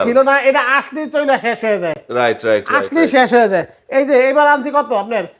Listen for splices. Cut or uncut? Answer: uncut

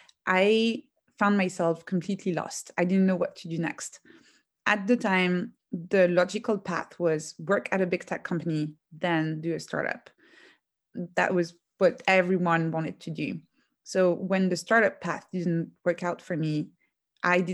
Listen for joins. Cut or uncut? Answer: uncut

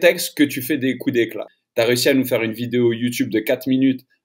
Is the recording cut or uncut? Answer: cut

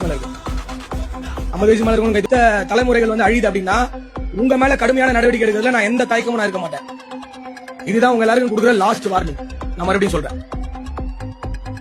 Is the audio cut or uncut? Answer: cut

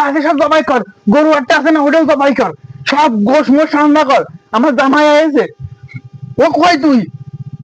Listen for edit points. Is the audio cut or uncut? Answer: uncut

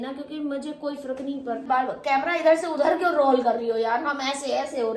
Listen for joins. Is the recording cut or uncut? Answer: cut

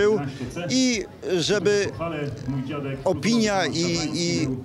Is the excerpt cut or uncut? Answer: uncut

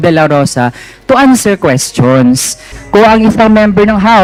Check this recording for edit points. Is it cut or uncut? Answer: uncut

